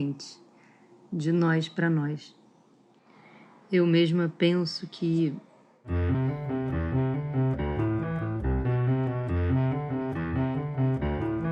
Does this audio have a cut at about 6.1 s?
yes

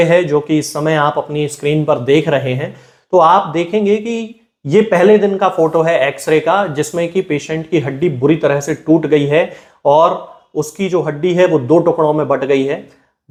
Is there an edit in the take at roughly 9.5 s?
no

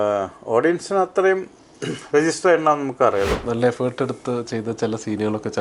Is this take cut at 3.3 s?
yes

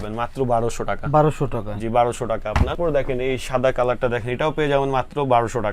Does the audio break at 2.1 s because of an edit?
no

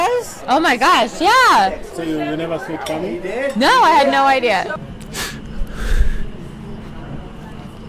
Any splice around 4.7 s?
yes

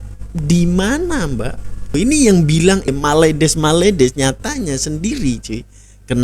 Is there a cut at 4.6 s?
no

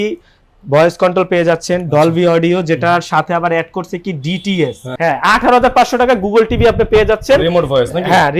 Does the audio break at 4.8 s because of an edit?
yes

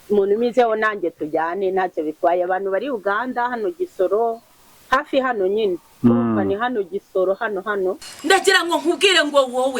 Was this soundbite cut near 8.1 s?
yes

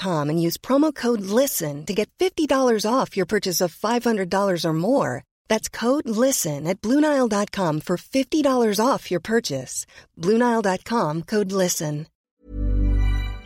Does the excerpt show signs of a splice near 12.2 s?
yes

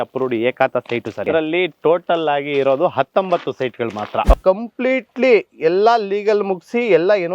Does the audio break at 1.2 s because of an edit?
yes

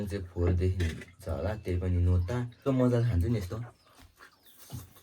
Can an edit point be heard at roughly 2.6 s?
yes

